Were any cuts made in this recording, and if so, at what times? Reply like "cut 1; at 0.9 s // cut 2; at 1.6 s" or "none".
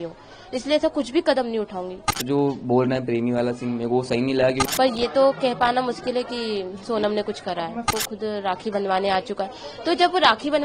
cut 1; at 2.2 s // cut 2; at 4.6 s // cut 3; at 7.9 s